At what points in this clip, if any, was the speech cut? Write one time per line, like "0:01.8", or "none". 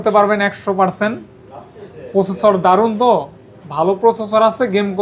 none